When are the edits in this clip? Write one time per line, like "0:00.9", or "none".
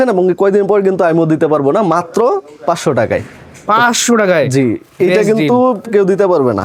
none